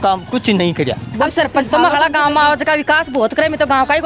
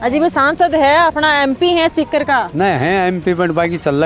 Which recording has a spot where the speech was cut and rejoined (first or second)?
first